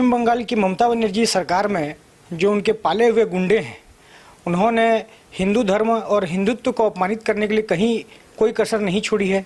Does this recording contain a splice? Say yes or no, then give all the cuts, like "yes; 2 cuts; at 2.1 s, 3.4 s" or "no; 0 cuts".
no; 0 cuts